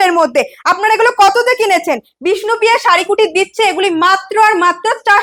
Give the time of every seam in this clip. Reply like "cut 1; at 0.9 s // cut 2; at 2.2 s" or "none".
none